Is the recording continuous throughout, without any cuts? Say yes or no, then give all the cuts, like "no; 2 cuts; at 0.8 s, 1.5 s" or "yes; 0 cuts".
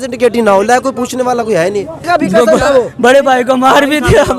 no; 1 cut; at 2.0 s